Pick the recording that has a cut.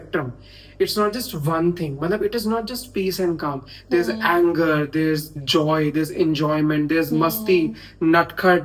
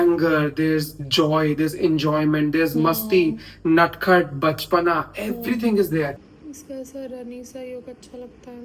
second; 1 cut; at 6.1 s

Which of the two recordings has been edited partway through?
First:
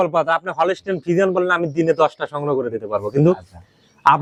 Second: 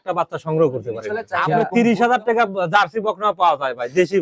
second; 1 cut; at 1.3 s

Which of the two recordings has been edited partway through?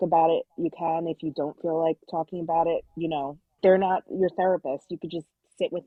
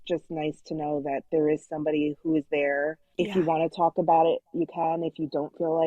second; 1 cut; at 3.0 s

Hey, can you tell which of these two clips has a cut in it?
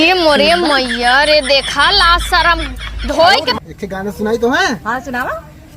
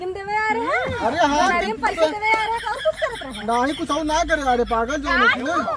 first; 1 cut; at 3.6 s

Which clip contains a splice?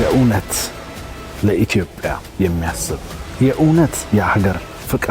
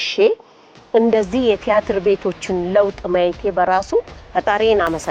second; 1 cut; at 4.2 s

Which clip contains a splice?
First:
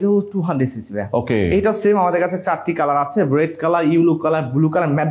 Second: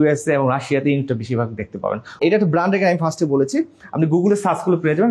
second; 1 cut; at 2.2 s

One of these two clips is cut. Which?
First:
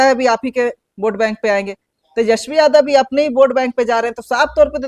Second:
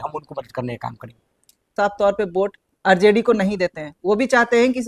second; 1 cut; at 1.7 s

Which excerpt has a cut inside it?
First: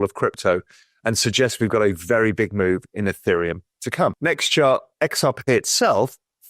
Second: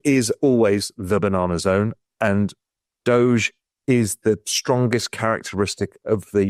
first; 1 cut; at 4.2 s

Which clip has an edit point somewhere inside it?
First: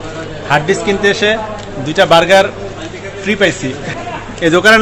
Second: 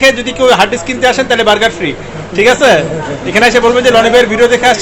first; 1 cut; at 3.9 s

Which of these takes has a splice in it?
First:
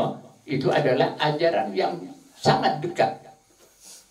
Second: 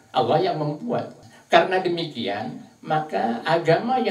second; 1 cut; at 1.2 s

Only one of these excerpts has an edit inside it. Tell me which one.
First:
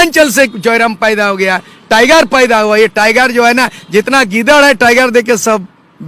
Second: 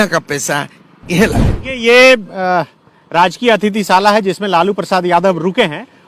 second; 1 cut; at 1.6 s

